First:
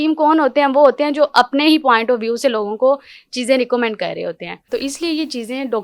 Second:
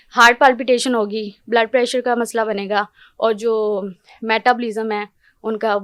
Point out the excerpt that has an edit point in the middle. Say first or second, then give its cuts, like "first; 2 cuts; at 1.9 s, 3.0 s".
first; 1 cut; at 4.5 s